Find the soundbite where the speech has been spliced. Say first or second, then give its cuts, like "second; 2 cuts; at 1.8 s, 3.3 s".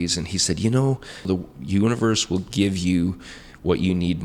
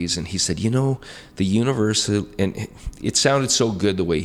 first; 1 cut; at 1.3 s